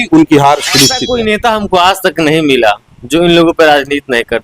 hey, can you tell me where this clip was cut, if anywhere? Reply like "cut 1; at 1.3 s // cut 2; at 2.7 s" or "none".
cut 1; at 1.0 s